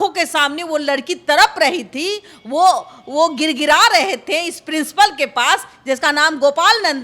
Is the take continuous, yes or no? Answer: yes